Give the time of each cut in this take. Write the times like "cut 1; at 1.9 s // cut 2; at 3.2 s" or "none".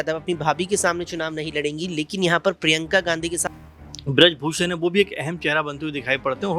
cut 1; at 3.4 s